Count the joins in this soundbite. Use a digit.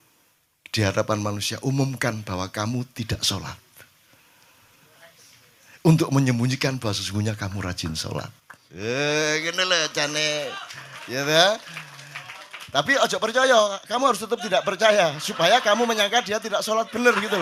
0